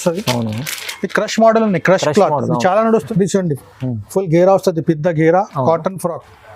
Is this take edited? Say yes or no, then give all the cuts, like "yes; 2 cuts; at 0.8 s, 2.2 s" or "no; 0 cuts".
yes; 1 cut; at 3.1 s